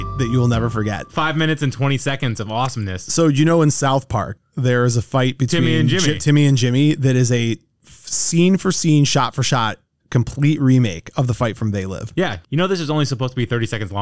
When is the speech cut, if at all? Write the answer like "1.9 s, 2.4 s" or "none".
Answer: none